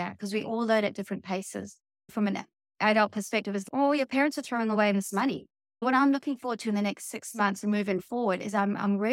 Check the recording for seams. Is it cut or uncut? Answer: cut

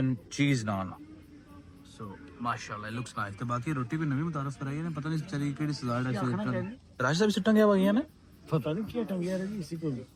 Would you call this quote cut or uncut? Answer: uncut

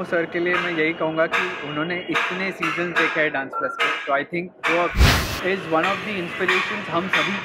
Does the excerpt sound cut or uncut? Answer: cut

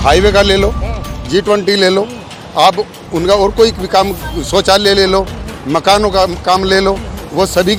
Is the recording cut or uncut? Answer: uncut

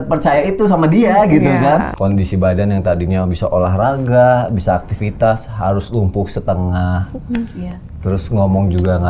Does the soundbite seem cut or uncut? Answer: cut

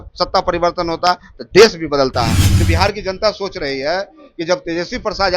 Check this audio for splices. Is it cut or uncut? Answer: cut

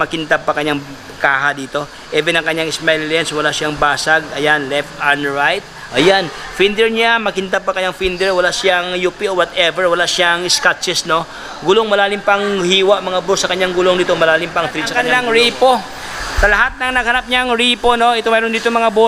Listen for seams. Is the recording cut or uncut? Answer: cut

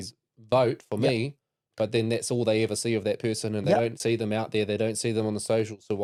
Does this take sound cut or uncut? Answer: uncut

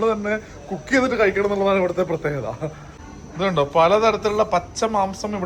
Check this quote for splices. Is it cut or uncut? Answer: uncut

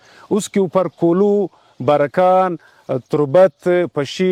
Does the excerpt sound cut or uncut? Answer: uncut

